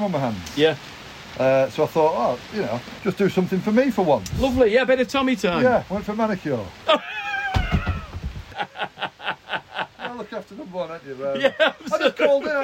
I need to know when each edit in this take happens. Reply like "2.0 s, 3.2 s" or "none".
2.9 s, 8.5 s